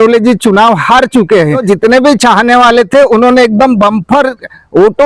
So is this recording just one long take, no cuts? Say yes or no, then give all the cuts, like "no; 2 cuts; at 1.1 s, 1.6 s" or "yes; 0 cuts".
no; 1 cut; at 1.6 s